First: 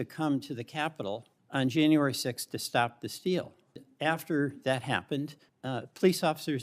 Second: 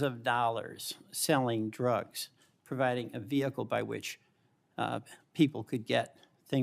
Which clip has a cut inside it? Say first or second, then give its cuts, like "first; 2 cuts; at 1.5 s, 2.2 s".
first; 2 cuts; at 1.3 s, 3.8 s